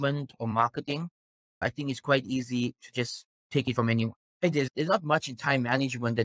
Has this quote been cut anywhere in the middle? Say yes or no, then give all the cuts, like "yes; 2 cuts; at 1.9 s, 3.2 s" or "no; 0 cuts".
yes; 2 cuts; at 1.6 s, 4.7 s